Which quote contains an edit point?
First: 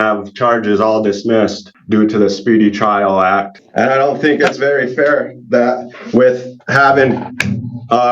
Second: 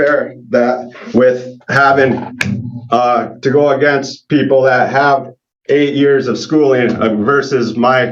first; 2 cuts; at 1.7 s, 3.6 s

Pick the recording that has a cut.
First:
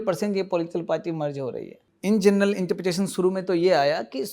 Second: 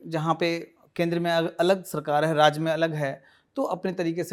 first; 1 cut; at 1.9 s

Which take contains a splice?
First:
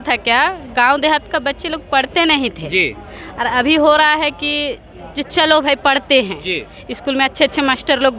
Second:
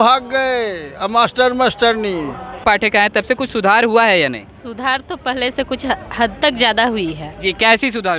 second; 1 cut; at 2.6 s

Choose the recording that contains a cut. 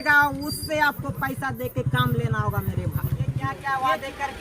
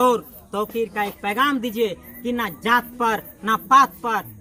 first; 1 cut; at 3.5 s

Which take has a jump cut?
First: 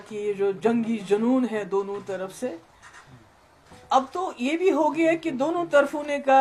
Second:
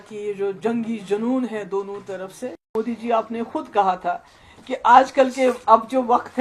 second; 1 cut; at 2.7 s

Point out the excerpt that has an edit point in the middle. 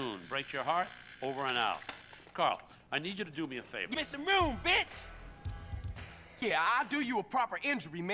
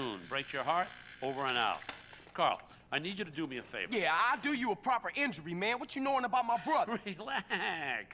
second; 1 cut; at 4.0 s

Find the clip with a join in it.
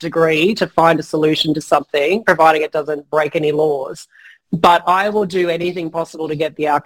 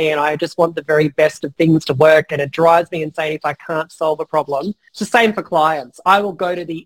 second; 1 cut; at 4.9 s

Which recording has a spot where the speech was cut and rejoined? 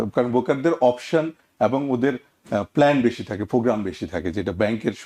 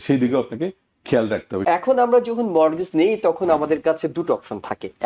second; 1 cut; at 1.6 s

